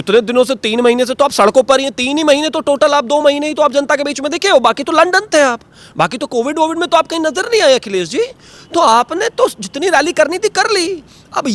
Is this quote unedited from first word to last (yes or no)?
yes